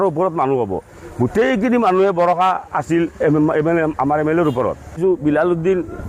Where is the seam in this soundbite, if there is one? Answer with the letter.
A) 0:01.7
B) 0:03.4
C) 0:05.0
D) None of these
C